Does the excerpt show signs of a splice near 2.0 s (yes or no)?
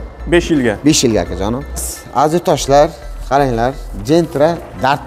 yes